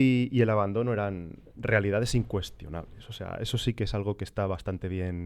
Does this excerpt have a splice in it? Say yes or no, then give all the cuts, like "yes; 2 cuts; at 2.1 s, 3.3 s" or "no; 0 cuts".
no; 0 cuts